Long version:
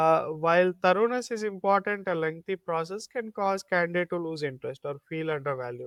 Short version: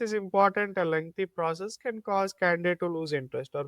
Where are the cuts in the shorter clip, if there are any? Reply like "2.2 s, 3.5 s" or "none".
none